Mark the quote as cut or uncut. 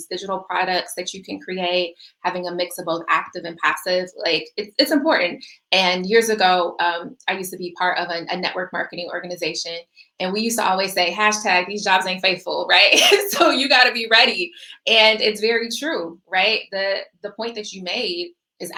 uncut